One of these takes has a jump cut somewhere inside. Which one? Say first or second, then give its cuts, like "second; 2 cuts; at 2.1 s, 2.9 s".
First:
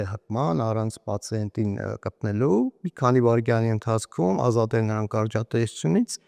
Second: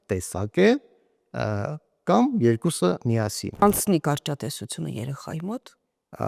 second; 1 cut; at 3.6 s